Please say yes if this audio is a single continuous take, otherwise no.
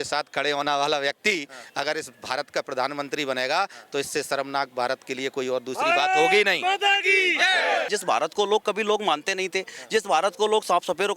no